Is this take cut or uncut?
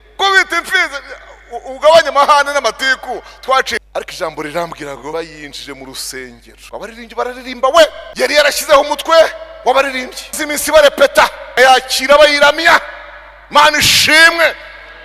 cut